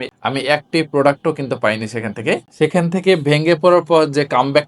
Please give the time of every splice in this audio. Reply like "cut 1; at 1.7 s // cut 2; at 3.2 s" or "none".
cut 1; at 2.5 s